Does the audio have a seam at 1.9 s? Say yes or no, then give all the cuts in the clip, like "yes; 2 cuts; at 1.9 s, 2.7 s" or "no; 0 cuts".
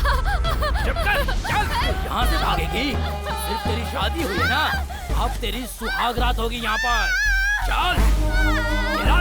yes; 1 cut; at 1.9 s